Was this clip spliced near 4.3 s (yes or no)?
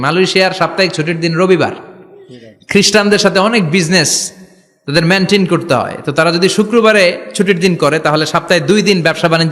no